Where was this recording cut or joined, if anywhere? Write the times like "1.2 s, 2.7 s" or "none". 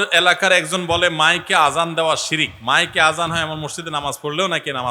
2.5 s